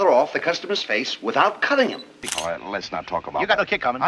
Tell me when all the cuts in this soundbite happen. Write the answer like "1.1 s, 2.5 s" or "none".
2.1 s